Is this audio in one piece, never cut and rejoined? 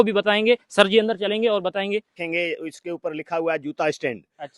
no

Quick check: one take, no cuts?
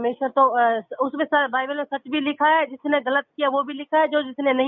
yes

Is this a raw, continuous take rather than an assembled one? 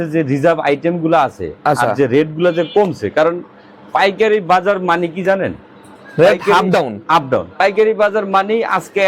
yes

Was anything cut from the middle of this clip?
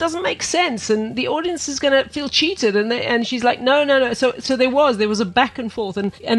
no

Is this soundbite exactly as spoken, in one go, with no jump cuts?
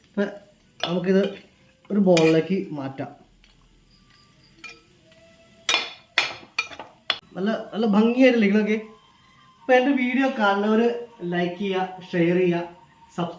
no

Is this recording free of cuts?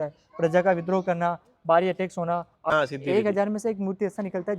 no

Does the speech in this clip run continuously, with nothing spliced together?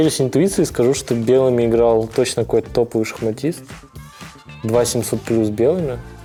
yes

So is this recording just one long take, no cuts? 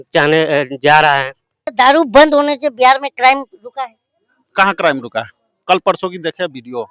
no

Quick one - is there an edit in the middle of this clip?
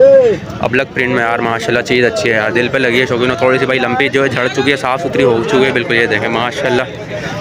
no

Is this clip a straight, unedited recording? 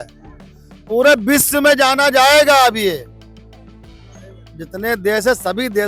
yes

